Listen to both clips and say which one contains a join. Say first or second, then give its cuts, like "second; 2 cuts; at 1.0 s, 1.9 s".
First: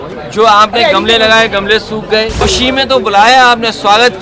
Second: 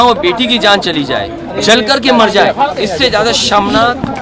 first; 1 cut; at 2.4 s